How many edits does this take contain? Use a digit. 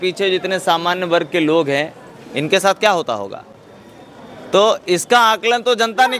0